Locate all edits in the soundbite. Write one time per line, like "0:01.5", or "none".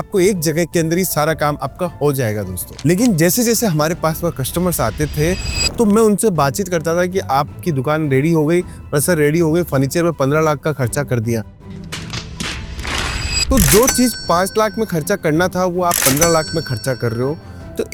none